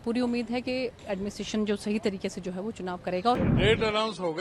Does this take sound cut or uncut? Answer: cut